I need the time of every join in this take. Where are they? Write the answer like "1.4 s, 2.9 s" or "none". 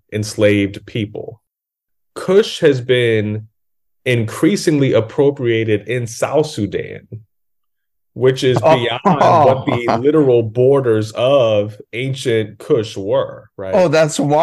1.6 s